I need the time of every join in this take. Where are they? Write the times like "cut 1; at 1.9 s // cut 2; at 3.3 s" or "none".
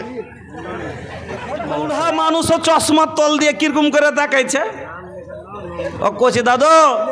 cut 1; at 1.9 s